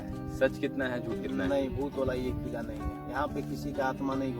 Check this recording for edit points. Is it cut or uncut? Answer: uncut